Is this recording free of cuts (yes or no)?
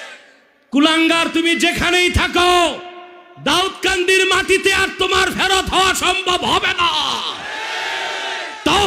yes